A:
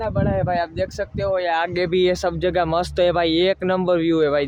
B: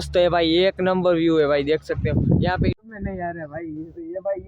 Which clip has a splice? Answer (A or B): B